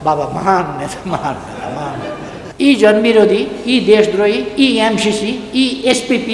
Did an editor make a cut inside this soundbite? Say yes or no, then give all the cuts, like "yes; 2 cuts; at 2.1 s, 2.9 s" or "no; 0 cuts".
yes; 1 cut; at 2.4 s